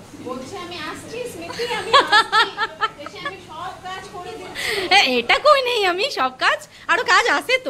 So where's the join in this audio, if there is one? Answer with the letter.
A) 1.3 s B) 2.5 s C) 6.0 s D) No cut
D